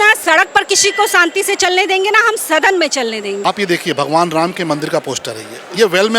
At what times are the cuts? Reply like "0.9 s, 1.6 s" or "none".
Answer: 3.5 s